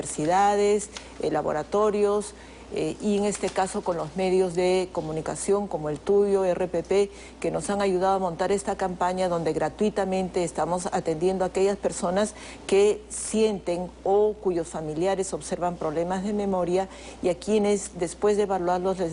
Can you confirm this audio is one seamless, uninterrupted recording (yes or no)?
no